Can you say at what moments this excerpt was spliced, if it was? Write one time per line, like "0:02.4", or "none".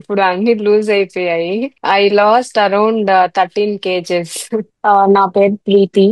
0:01.7
0:04.7